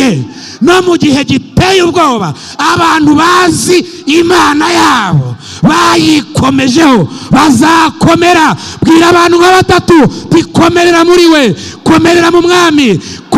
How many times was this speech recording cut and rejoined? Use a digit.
0